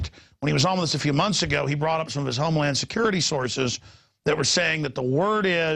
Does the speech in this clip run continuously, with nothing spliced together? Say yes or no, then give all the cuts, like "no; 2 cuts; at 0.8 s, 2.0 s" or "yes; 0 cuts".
yes; 0 cuts